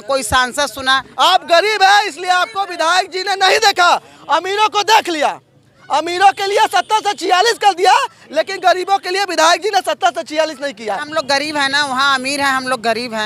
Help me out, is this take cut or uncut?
cut